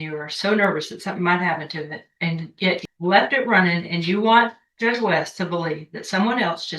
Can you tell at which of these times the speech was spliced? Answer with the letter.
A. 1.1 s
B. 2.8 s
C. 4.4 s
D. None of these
B